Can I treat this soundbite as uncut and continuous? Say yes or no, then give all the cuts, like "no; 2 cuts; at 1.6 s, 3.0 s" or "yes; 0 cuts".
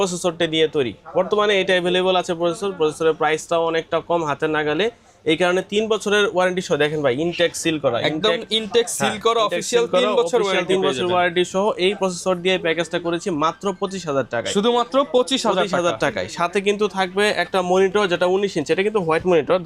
yes; 0 cuts